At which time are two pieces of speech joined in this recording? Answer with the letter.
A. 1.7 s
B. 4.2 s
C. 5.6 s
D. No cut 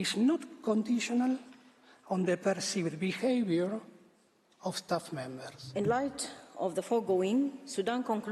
C